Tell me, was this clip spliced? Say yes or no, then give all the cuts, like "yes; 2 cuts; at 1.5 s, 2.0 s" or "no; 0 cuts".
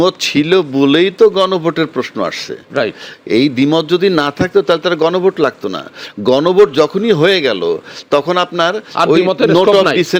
no; 0 cuts